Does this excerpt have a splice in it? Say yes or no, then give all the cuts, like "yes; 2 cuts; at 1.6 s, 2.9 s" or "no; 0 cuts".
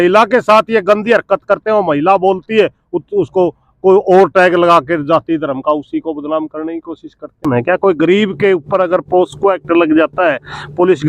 yes; 1 cut; at 7.5 s